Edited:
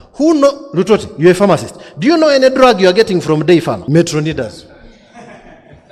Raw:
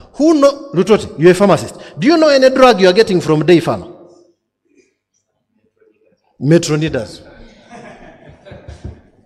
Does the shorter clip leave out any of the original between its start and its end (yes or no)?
yes